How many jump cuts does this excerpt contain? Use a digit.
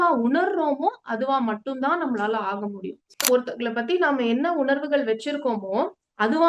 1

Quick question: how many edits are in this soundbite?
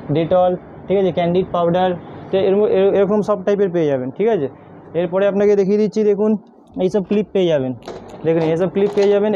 0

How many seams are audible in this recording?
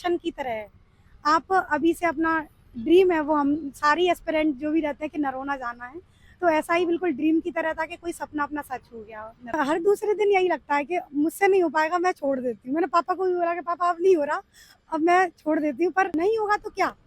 2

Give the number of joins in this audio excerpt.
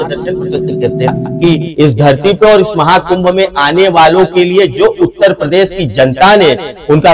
1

